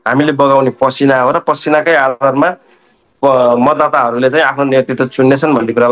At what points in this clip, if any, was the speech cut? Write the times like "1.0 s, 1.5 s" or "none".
none